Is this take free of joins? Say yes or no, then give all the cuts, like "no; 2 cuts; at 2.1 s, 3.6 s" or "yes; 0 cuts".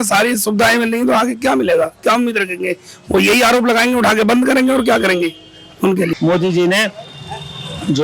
no; 1 cut; at 6.1 s